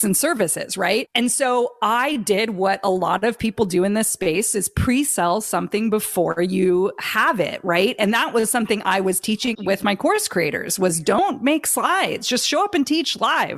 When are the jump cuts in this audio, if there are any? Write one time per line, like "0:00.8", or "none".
0:11.2